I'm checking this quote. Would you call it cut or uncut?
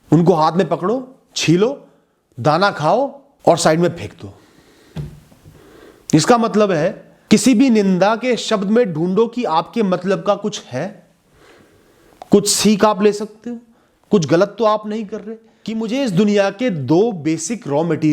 cut